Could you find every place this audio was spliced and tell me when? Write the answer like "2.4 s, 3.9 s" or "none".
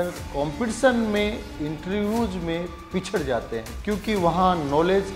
3.7 s